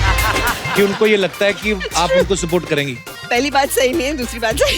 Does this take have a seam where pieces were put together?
yes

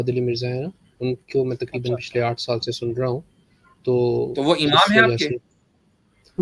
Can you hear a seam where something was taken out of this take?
no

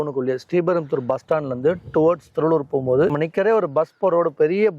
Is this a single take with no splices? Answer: no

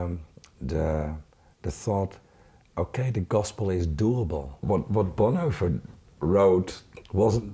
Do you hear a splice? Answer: yes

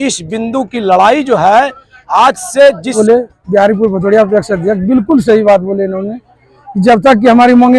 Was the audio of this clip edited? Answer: yes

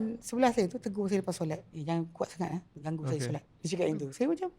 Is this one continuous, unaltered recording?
no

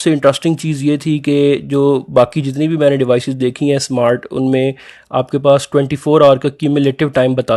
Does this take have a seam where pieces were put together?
no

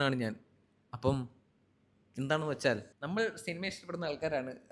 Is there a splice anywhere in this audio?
yes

